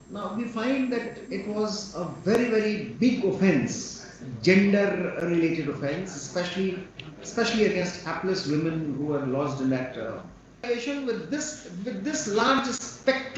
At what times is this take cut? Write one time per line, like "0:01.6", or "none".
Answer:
0:10.7